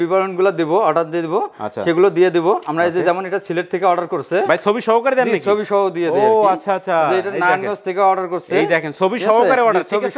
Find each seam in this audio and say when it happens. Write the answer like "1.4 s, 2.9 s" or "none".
none